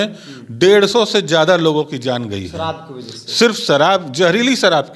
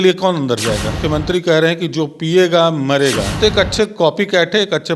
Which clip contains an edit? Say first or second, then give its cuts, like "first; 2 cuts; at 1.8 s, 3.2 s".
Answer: second; 2 cuts; at 1.0 s, 3.3 s